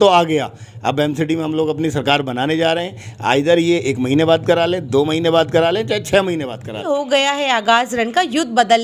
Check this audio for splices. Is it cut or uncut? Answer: cut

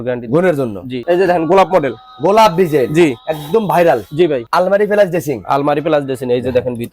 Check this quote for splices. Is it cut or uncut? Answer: cut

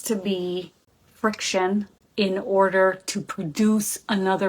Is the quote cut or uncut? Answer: cut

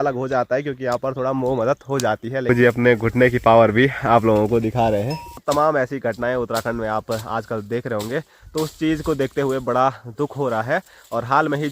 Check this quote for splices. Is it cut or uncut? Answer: cut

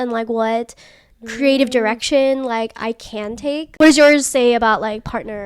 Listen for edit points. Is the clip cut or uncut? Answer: cut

